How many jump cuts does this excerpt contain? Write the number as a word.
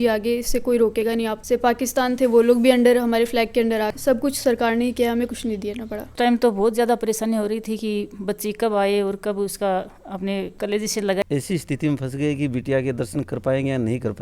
four